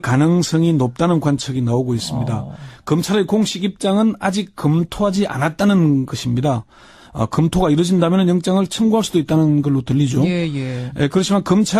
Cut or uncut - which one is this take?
cut